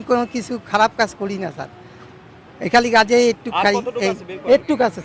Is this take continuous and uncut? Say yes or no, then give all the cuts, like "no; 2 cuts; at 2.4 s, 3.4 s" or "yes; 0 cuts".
yes; 0 cuts